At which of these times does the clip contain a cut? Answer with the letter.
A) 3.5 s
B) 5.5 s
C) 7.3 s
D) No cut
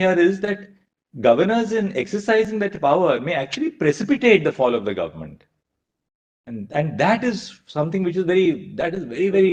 D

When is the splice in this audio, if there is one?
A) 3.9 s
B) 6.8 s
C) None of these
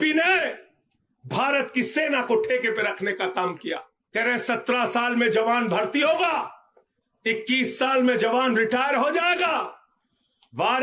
A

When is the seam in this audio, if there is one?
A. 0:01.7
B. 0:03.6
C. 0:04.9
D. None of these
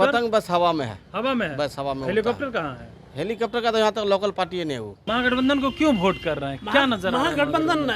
C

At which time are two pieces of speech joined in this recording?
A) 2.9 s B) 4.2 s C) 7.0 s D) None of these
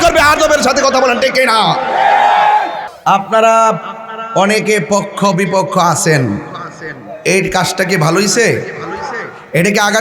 A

